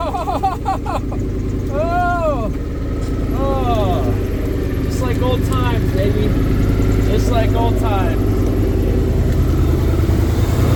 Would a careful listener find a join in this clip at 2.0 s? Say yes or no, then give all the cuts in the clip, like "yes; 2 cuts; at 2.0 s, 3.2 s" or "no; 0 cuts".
no; 0 cuts